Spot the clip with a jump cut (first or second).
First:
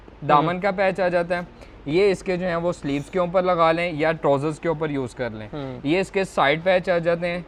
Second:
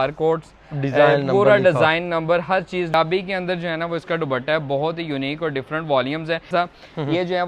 second